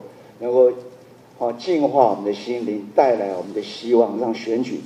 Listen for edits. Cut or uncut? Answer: uncut